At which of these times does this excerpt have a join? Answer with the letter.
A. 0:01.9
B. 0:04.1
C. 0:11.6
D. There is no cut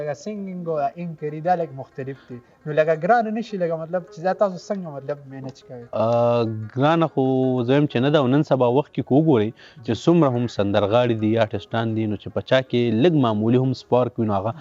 D